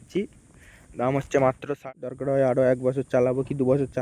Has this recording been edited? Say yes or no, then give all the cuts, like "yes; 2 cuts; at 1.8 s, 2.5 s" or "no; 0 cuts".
yes; 1 cut; at 1.7 s